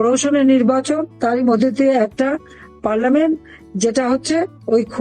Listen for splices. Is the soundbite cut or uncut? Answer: cut